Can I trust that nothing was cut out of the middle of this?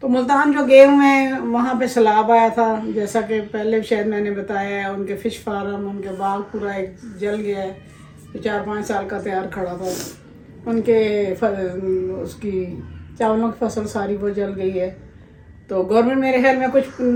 yes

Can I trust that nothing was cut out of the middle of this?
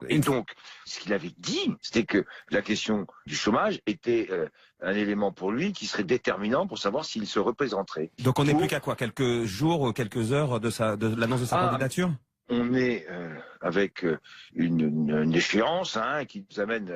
yes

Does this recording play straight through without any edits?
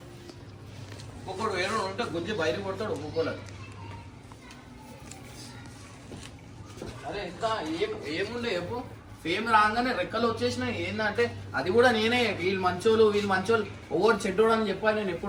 yes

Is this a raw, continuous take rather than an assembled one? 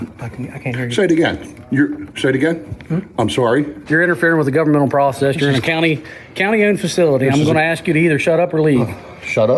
no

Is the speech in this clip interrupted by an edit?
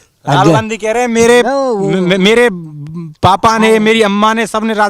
no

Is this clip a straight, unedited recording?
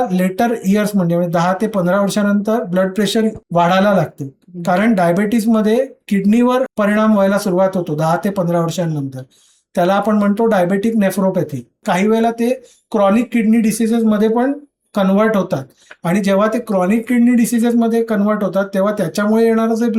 yes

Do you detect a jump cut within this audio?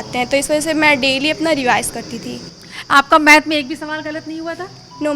no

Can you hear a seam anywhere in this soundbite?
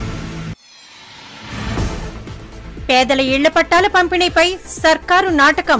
yes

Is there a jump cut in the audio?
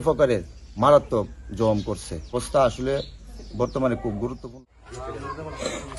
yes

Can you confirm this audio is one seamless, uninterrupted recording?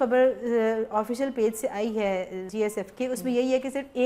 no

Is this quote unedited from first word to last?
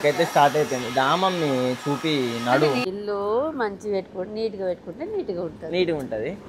no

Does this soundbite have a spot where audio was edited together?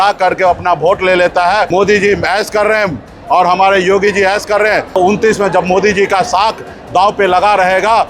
yes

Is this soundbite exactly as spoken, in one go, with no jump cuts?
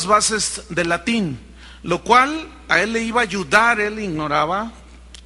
no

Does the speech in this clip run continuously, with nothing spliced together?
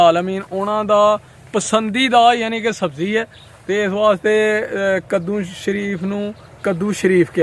yes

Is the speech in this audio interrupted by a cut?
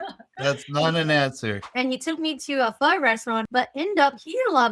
yes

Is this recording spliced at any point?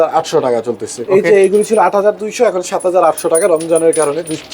yes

